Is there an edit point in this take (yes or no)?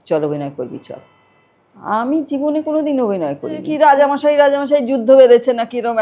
yes